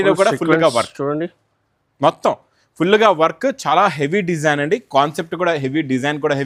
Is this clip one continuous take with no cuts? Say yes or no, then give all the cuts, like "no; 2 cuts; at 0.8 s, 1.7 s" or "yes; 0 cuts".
yes; 0 cuts